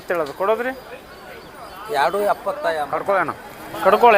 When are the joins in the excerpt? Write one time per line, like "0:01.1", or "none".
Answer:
0:03.0